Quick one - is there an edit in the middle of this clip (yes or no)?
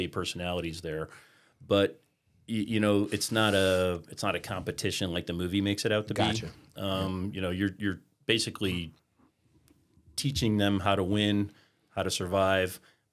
no